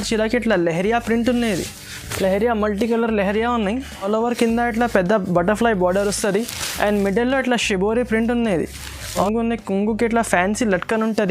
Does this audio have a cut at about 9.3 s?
yes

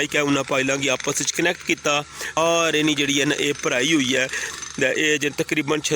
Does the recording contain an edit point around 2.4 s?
yes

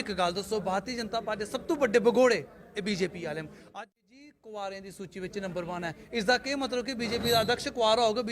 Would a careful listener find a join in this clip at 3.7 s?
yes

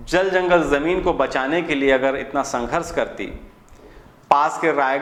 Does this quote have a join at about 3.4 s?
no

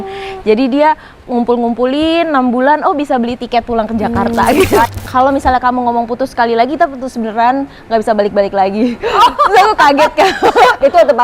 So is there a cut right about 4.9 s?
yes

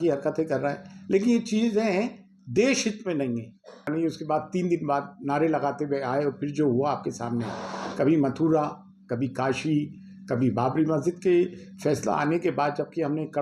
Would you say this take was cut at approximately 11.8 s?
no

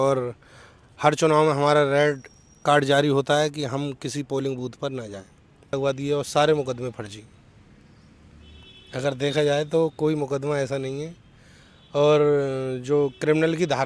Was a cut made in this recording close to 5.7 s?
yes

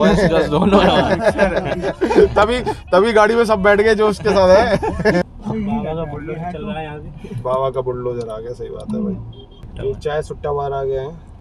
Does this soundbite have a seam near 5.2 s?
yes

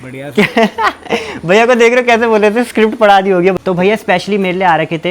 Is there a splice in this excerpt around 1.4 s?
no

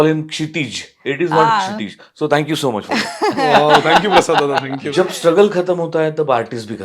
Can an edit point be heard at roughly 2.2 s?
no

